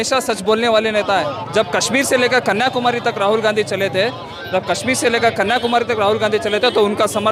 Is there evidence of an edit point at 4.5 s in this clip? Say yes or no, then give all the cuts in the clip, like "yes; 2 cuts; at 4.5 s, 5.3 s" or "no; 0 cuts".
no; 0 cuts